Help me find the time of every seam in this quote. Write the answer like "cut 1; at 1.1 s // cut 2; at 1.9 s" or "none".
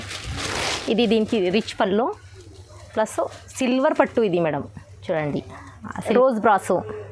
cut 1; at 6.1 s